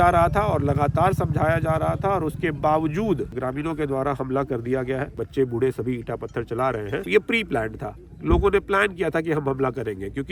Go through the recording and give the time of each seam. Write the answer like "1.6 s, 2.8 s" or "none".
3.3 s, 5.2 s, 7.1 s